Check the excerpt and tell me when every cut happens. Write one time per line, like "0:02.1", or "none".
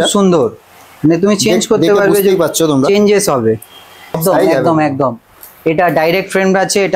0:04.2